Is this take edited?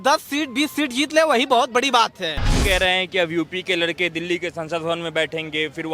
yes; 1 cut; at 2.5 s

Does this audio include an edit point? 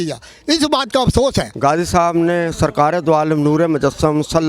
yes; 1 cut; at 1.5 s

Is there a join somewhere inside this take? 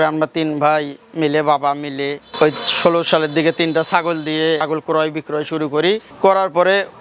yes; 1 cut; at 4.7 s

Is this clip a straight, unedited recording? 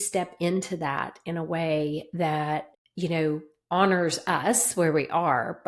no; 1 cut; at 2.8 s

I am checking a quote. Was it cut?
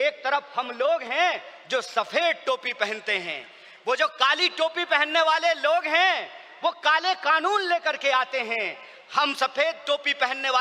no; 0 cuts

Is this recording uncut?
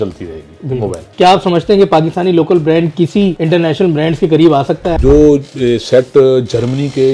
no; 3 cuts; at 1.0 s, 3.4 s, 5.0 s

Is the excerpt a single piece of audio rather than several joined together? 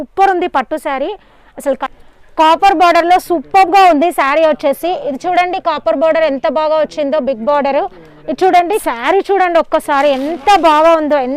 no; 2 cuts; at 1.9 s, 8.8 s

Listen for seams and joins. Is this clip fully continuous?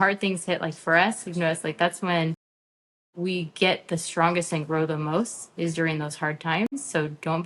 yes; 0 cuts

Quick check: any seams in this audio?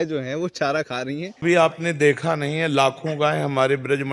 yes; 1 cut; at 1.3 s

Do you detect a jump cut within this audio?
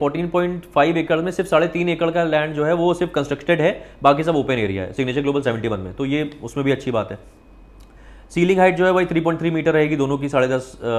no; 0 cuts

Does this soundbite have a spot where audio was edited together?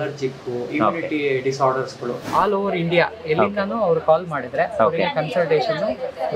yes; 1 cut; at 2.2 s

